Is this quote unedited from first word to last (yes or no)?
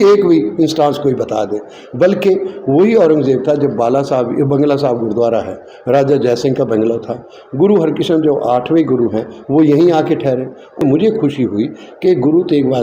no